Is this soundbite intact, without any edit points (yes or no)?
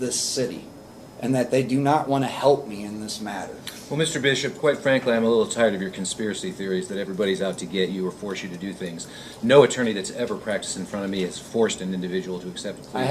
yes